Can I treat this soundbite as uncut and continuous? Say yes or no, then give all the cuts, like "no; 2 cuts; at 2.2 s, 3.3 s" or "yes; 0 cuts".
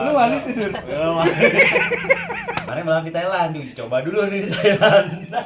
no; 2 cuts; at 1.4 s, 2.6 s